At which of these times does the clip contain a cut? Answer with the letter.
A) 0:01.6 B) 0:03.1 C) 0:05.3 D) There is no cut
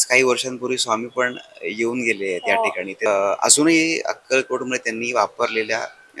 B